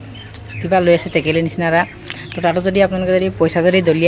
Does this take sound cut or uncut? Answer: uncut